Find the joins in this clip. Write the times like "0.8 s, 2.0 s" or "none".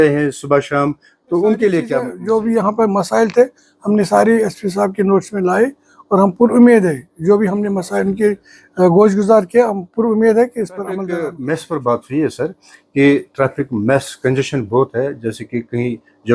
2.1 s, 11.2 s